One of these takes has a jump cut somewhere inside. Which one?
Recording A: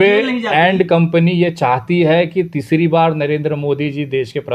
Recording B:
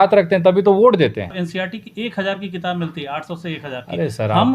B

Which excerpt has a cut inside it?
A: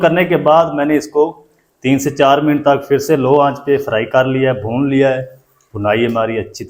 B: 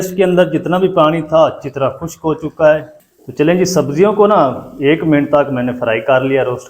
B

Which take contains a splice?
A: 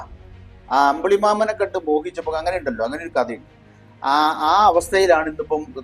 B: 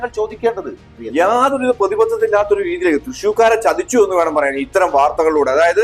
B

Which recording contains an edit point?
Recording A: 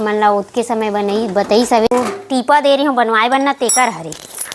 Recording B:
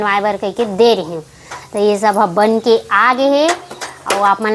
A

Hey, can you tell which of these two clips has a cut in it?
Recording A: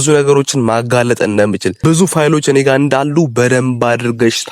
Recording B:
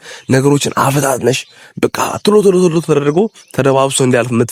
A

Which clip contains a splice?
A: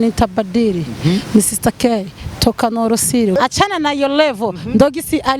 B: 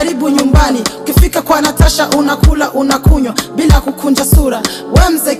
A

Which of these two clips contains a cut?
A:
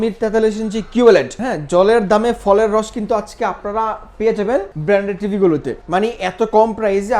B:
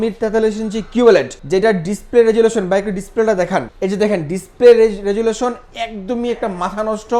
A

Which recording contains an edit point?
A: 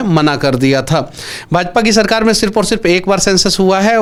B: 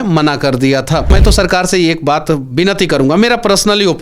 B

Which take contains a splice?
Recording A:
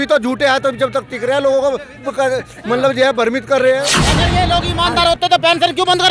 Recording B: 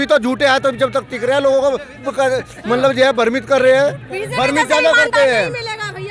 A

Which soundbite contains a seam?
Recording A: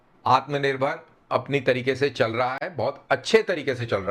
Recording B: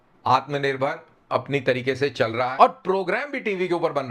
B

